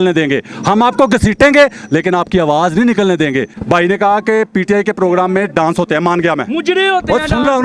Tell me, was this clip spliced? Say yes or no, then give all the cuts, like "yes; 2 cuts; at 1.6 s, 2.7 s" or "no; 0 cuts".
yes; 1 cut; at 3.5 s